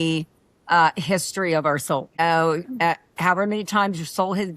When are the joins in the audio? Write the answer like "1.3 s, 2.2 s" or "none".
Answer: 2.2 s